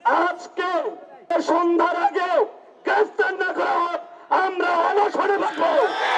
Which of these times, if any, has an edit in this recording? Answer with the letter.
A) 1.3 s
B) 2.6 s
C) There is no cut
A